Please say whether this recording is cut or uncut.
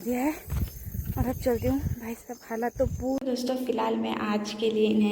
cut